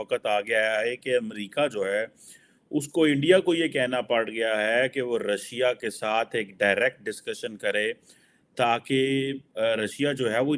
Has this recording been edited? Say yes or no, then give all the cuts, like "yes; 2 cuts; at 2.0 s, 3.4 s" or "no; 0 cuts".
no; 0 cuts